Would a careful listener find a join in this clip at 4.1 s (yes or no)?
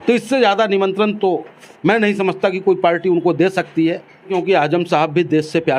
yes